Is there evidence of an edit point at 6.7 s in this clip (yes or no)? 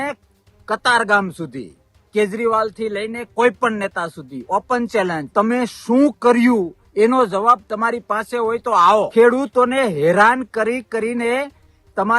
no